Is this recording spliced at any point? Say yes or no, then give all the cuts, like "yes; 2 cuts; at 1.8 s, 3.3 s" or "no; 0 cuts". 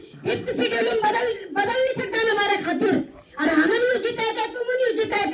no; 0 cuts